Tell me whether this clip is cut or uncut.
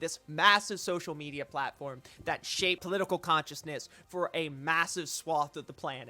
cut